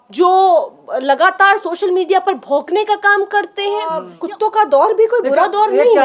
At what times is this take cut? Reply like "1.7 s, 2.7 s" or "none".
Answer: 4.1 s